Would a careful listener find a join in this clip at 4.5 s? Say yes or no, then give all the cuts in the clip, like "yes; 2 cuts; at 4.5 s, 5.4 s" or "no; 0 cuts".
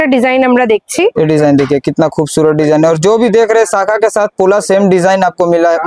no; 1 cut; at 1.1 s